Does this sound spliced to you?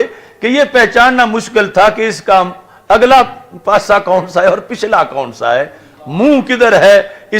no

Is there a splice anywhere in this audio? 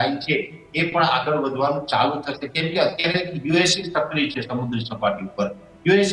no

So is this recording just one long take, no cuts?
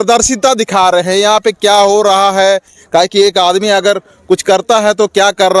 yes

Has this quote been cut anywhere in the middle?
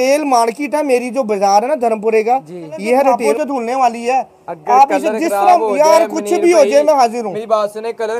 yes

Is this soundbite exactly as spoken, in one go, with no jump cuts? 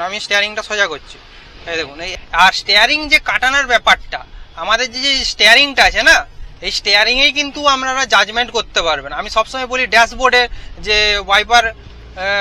no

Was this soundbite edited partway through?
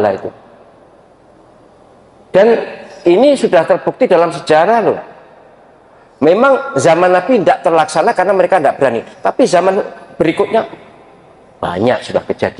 no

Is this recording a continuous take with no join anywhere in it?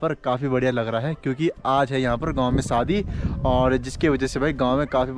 yes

